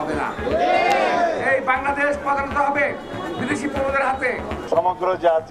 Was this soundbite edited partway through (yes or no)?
yes